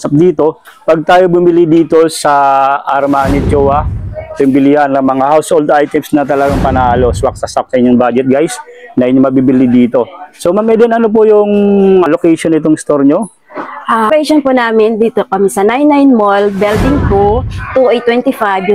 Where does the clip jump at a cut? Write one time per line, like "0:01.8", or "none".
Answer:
0:12.1
0:14.1